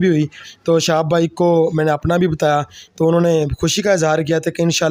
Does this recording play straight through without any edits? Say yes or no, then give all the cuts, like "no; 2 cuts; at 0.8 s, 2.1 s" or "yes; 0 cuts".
yes; 0 cuts